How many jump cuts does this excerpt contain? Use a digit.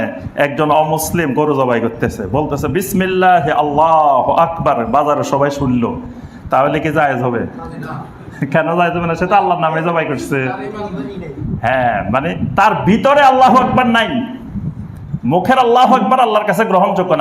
0